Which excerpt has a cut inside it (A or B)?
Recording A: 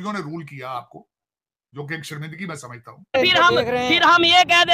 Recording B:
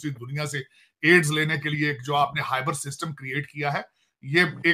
A